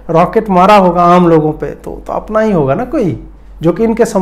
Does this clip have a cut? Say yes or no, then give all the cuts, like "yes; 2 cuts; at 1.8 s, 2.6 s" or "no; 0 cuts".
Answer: no; 0 cuts